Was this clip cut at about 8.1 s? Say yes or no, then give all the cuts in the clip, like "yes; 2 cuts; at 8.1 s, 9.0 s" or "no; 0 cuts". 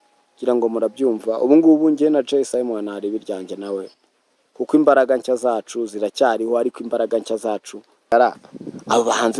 yes; 1 cut; at 8.1 s